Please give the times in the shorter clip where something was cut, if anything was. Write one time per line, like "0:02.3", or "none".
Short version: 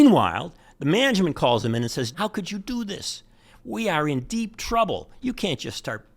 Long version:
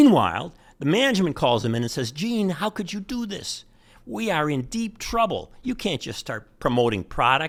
0:02.2